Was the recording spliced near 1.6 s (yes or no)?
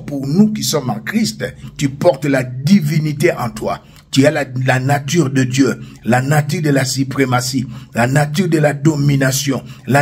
yes